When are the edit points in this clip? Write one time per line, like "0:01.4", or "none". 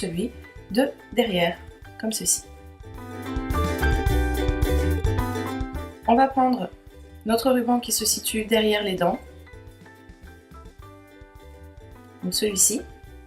0:04.4